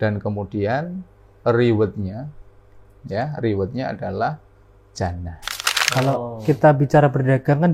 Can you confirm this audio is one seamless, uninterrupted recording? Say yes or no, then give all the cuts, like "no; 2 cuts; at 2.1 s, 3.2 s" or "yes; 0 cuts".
no; 1 cut; at 5.8 s